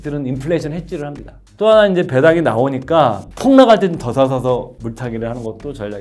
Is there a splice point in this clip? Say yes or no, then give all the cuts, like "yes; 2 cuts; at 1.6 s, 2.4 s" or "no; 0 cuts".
yes; 3 cuts; at 1.4 s, 3.2 s, 4.7 s